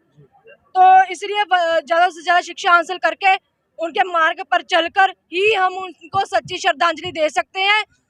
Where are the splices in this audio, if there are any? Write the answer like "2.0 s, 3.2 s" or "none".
none